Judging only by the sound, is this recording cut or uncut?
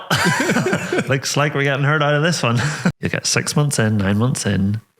cut